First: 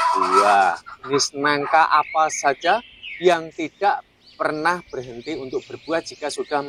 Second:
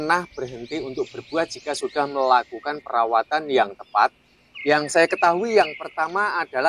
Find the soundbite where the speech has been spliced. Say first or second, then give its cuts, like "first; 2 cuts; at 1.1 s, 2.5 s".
first; 1 cut; at 1.0 s